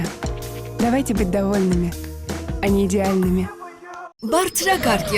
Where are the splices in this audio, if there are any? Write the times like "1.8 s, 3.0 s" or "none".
4.1 s